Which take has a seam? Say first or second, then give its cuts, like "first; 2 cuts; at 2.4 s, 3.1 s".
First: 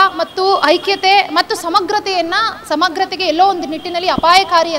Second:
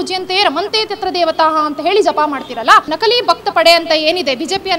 second; 1 cut; at 2.9 s